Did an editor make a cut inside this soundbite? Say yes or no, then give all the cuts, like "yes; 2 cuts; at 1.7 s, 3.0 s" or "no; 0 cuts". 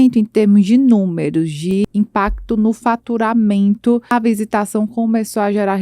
yes; 2 cuts; at 1.8 s, 4.1 s